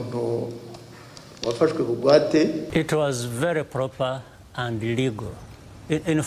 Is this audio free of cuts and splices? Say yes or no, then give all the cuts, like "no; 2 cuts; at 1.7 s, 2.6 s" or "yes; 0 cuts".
no; 1 cut; at 2.7 s